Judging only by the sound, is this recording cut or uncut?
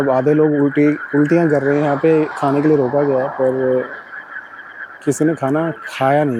uncut